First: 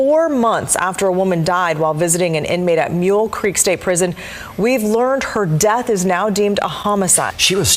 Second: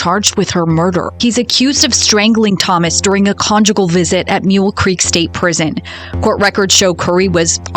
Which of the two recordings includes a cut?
second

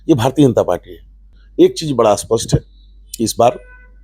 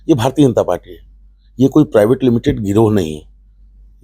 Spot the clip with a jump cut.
first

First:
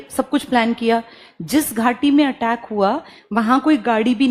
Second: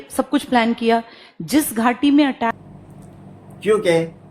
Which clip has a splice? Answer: second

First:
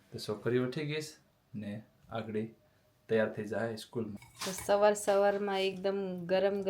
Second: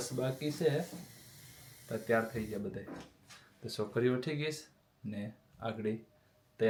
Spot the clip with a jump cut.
first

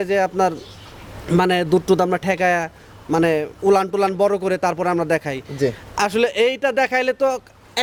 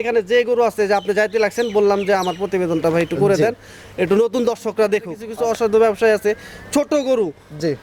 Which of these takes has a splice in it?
second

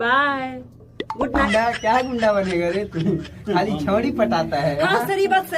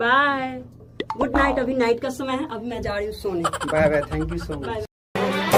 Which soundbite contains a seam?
first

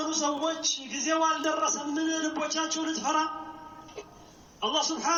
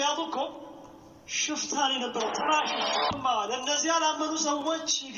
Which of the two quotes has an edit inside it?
second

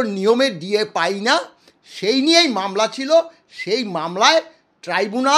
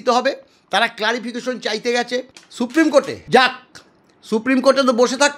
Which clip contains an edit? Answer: second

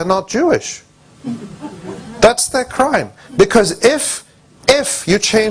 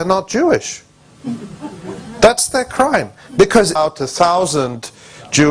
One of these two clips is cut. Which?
first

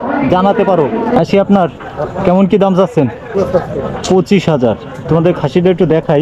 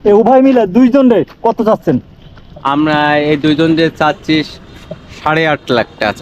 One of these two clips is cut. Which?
first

